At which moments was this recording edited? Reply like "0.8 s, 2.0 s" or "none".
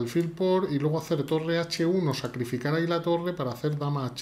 none